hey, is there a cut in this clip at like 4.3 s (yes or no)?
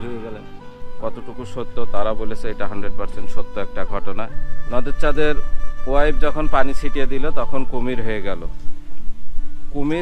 yes